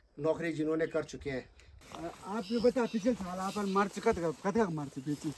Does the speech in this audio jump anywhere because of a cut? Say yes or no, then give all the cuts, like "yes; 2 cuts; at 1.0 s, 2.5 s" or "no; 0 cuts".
yes; 1 cut; at 1.8 s